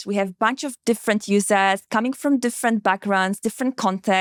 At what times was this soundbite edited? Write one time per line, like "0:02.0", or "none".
none